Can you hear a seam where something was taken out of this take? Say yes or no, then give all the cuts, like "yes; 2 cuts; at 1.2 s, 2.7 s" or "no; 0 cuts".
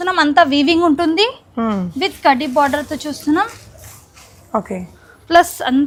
no; 0 cuts